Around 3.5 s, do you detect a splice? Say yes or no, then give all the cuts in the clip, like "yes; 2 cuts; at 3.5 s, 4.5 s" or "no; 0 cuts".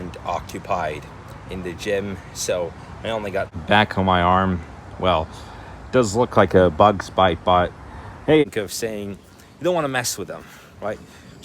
yes; 2 cuts; at 3.5 s, 8.4 s